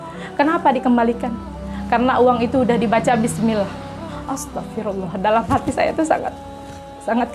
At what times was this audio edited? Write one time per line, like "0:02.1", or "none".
none